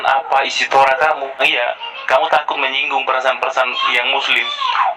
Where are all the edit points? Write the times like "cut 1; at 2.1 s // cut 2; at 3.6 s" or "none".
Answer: cut 1; at 1.4 s